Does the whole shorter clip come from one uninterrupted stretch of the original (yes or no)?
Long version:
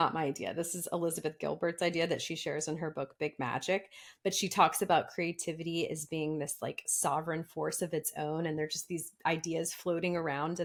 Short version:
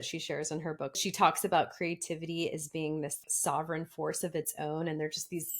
no